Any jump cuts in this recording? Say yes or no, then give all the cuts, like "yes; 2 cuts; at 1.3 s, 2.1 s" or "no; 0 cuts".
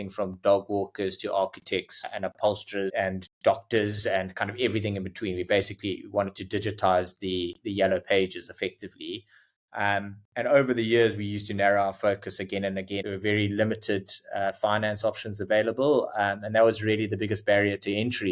yes; 2 cuts; at 2.9 s, 13.0 s